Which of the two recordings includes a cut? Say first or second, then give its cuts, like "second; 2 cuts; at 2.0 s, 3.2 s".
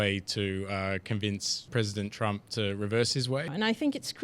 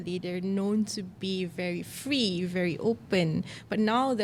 first; 2 cuts; at 1.6 s, 3.5 s